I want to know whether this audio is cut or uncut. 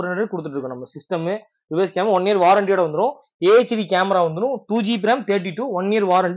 uncut